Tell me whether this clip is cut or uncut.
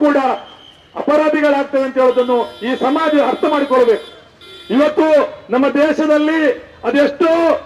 uncut